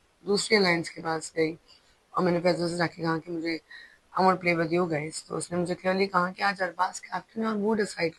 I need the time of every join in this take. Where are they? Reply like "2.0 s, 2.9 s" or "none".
none